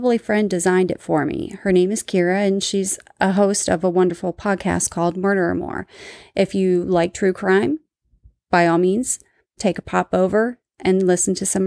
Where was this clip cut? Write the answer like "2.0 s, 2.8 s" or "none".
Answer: none